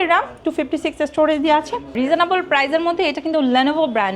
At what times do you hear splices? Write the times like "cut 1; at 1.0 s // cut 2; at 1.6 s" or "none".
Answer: cut 1; at 1.9 s